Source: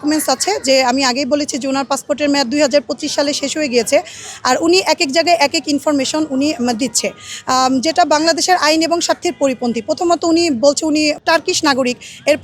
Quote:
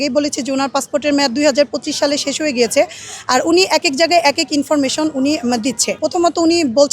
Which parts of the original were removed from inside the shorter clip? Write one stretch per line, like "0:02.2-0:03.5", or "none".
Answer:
0:07.1-0:09.8